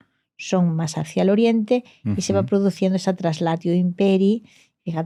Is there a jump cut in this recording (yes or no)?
no